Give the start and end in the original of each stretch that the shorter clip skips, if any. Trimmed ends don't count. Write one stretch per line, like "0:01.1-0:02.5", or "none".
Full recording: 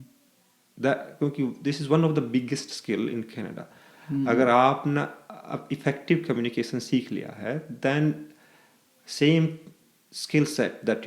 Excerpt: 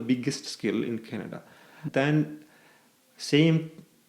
0:04.0-0:07.7